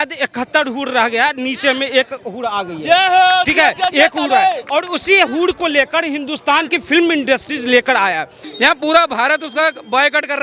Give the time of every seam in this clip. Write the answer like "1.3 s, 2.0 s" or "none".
8.4 s